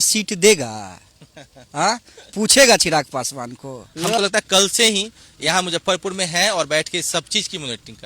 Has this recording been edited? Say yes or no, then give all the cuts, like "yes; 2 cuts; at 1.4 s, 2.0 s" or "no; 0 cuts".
yes; 1 cut; at 3.8 s